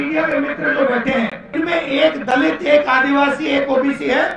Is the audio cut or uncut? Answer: cut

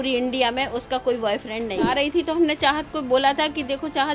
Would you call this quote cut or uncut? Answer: cut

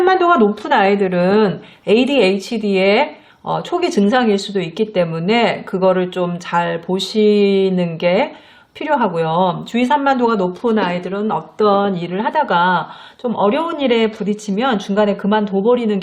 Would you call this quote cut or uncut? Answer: uncut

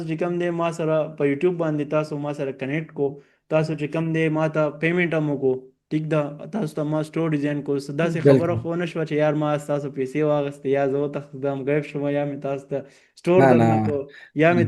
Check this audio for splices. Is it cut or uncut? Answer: uncut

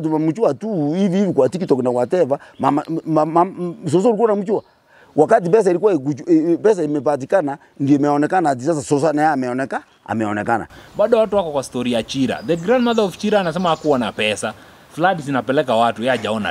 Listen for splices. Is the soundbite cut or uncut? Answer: cut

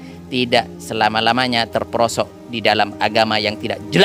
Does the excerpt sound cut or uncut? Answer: uncut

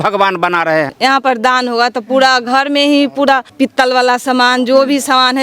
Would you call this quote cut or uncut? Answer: cut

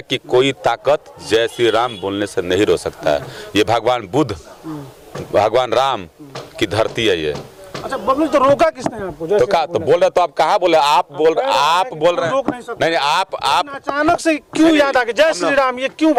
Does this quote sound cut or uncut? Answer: uncut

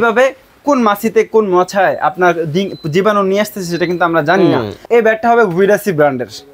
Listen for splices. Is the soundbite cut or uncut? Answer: cut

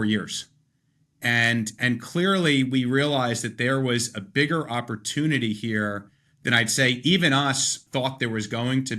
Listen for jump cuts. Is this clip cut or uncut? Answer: cut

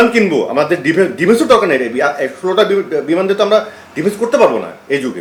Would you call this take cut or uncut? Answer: uncut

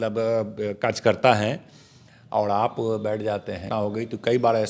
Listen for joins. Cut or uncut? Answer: cut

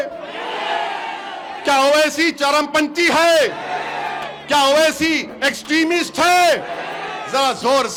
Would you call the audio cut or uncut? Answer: uncut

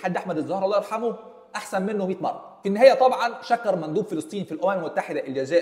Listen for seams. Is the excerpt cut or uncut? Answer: uncut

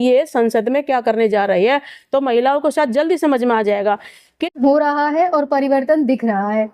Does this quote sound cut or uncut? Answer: cut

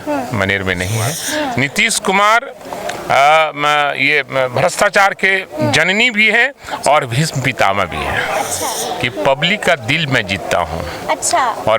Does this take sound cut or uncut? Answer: cut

